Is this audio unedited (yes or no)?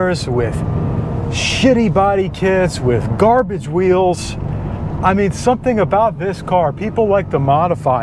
yes